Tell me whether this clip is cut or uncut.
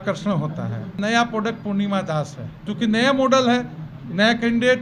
cut